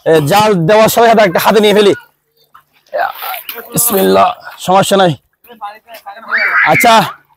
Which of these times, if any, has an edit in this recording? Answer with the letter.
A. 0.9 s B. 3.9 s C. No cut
C